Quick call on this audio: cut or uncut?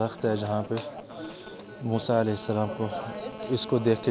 uncut